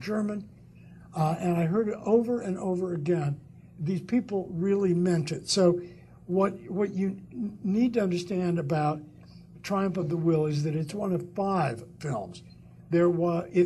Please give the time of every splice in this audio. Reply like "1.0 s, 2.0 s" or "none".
none